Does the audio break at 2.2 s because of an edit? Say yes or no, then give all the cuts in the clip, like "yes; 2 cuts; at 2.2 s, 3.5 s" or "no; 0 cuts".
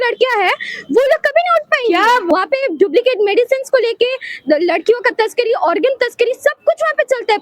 yes; 1 cut; at 2.2 s